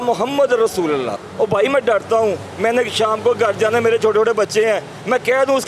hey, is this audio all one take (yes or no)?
no